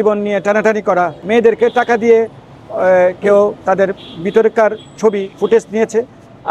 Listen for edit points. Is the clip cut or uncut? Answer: cut